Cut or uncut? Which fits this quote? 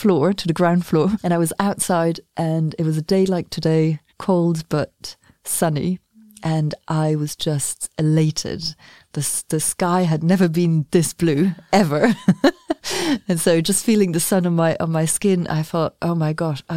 cut